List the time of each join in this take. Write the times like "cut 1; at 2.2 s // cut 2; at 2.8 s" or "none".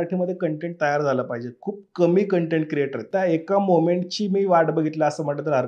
cut 1; at 3.1 s